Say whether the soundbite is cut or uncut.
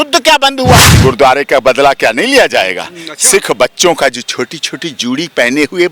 cut